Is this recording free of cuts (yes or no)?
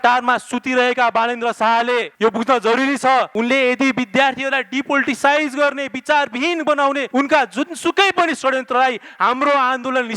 no